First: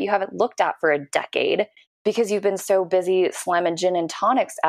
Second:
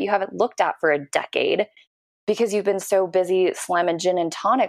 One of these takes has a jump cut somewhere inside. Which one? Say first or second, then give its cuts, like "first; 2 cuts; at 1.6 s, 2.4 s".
first; 1 cut; at 1.8 s